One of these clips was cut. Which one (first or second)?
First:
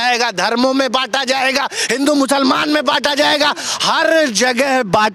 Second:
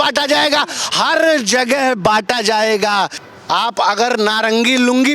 second